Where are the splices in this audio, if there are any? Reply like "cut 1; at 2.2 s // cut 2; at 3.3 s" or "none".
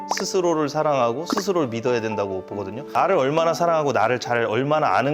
cut 1; at 2.8 s